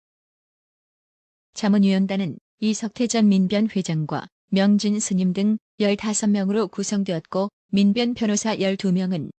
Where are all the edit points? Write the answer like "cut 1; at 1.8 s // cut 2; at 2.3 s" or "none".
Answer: cut 1; at 8.1 s